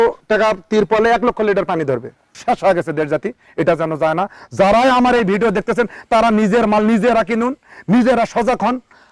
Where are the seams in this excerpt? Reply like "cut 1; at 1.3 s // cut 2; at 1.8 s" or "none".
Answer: cut 1; at 2.3 s